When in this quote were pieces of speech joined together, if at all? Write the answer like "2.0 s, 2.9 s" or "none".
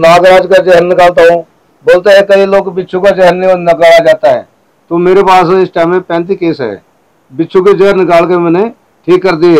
none